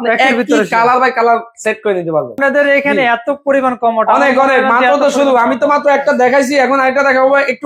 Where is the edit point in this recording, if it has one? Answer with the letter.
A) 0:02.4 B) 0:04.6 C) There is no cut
A